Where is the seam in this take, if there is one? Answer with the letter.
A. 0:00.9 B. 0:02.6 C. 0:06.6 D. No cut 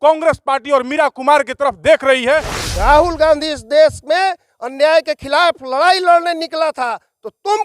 B